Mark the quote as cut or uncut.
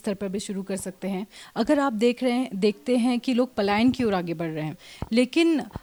uncut